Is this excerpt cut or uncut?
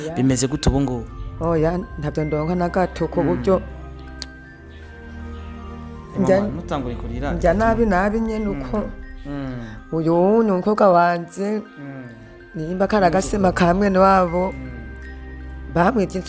cut